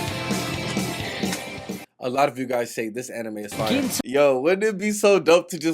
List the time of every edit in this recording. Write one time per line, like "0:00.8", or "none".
0:03.9